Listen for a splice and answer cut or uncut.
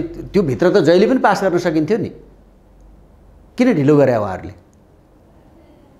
uncut